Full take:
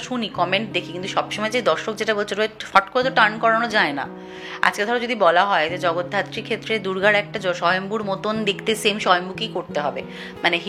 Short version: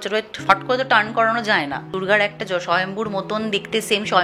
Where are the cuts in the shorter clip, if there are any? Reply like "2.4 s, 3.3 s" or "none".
1.9 s